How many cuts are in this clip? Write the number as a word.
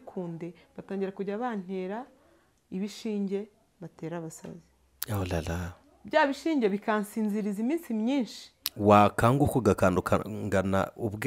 zero